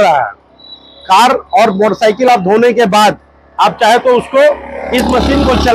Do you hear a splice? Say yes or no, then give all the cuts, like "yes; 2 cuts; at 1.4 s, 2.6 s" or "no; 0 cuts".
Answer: no; 0 cuts